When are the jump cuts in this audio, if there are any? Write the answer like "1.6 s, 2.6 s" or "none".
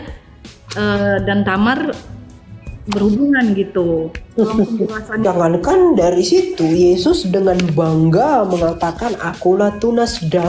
5.2 s